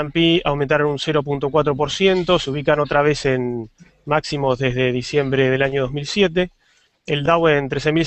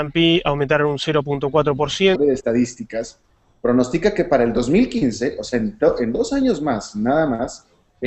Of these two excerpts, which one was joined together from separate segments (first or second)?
first